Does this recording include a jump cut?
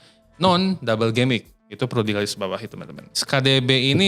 yes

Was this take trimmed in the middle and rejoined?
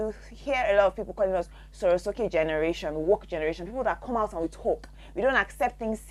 no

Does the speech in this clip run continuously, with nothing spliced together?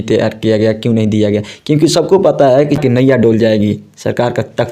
no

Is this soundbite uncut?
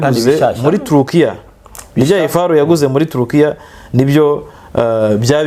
yes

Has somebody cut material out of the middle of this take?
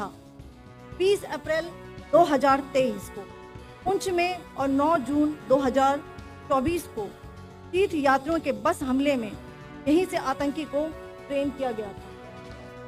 yes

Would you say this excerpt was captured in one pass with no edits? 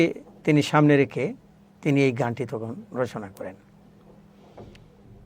yes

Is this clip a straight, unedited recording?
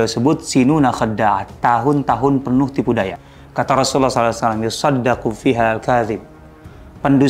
no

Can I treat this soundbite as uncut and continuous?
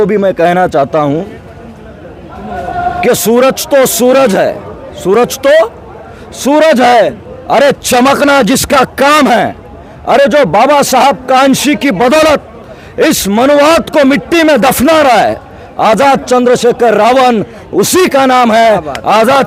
yes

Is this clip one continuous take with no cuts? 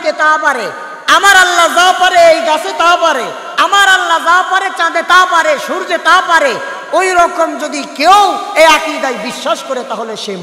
yes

